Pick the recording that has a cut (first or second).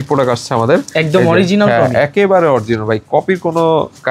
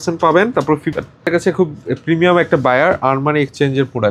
second